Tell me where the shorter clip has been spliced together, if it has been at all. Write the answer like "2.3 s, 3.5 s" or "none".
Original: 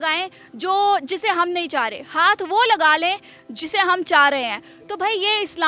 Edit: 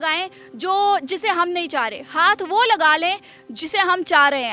none